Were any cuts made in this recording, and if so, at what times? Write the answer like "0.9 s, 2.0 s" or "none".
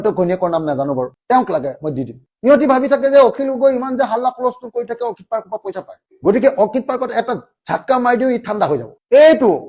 2.2 s